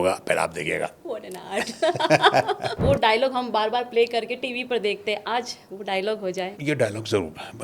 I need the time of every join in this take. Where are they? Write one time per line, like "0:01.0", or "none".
0:02.8
0:06.5